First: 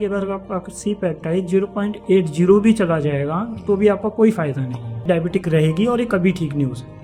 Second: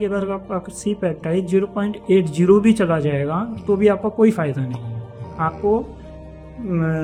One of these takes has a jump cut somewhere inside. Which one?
first; 1 cut; at 5.1 s

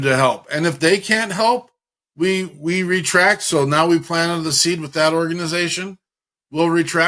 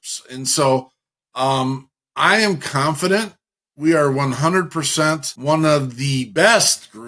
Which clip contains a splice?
second; 2 cuts; at 5.3 s, 6.3 s

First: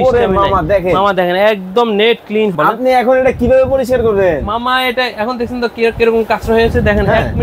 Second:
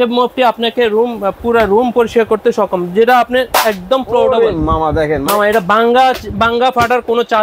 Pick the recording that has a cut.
first; 1 cut; at 2.5 s

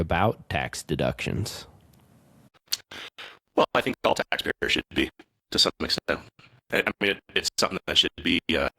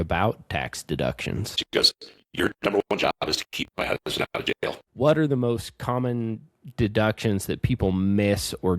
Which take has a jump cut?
second; 2 cuts; at 1.6 s, 4.8 s

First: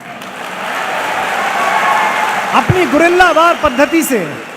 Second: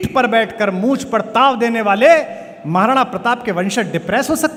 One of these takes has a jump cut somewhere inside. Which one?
first; 1 cut; at 2.5 s

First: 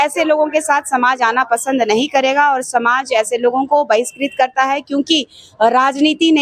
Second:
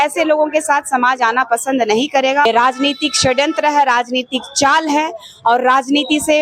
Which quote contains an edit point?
second; 1 cut; at 2.5 s

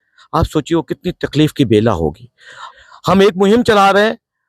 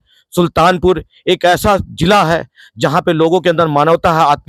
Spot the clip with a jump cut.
first; 1 cut; at 2.6 s

